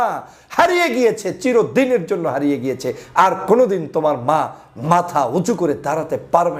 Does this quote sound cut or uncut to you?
uncut